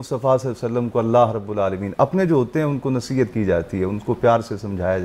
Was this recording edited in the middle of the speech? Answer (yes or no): no